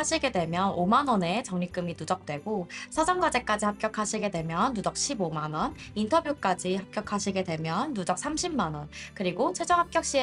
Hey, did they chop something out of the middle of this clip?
no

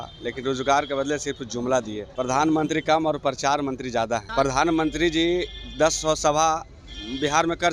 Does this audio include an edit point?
yes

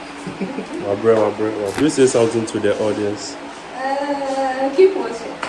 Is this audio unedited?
no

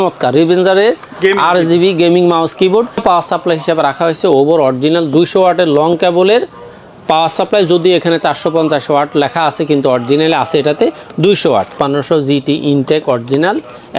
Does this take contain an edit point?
yes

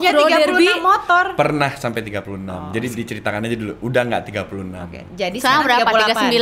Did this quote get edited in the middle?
no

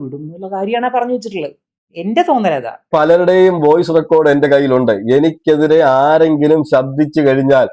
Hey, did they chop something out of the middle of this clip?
yes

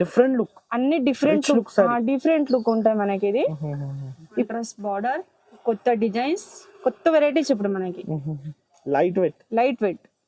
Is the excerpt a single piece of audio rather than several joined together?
no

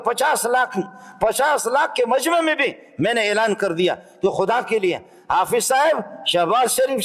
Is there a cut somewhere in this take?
no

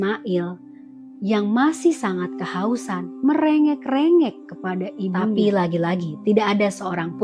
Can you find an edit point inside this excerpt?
yes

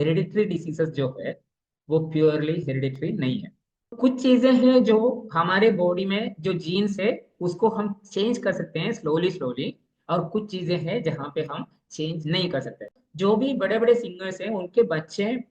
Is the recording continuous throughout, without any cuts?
no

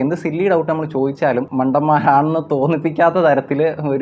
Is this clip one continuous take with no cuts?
no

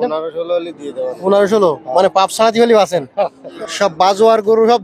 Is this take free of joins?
no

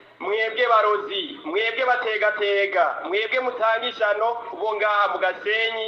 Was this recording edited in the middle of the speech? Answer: no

